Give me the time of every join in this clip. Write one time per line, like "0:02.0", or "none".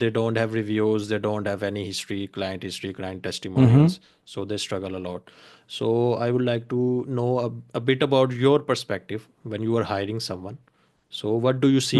none